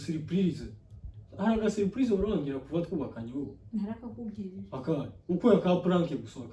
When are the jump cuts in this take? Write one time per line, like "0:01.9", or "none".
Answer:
none